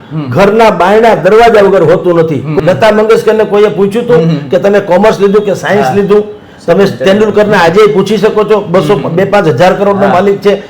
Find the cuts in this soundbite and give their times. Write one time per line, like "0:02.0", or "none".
0:02.5